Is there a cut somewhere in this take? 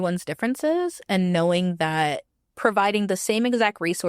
no; 0 cuts

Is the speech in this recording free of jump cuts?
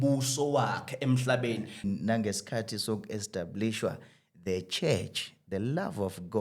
no; 1 cut; at 1.8 s

